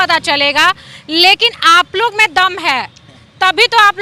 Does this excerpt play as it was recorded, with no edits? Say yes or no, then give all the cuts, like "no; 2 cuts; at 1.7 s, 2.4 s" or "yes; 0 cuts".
yes; 0 cuts